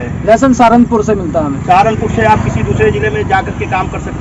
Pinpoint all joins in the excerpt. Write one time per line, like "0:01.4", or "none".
none